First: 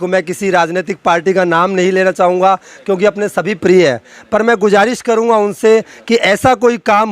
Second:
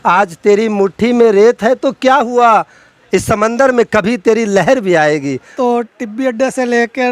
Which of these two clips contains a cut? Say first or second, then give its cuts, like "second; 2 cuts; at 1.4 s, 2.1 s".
second; 1 cut; at 5.5 s